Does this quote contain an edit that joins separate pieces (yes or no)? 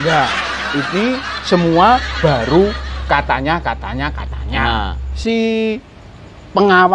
yes